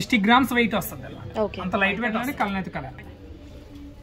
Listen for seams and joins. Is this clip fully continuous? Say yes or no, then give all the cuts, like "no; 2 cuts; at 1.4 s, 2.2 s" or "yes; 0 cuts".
no; 1 cut; at 2.2 s